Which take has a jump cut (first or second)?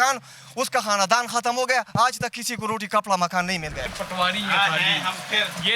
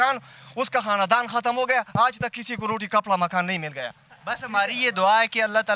first